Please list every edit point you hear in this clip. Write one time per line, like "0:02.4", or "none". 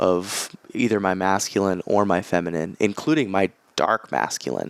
none